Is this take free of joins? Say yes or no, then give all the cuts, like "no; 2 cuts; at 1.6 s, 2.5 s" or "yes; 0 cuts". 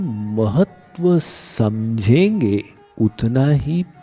yes; 0 cuts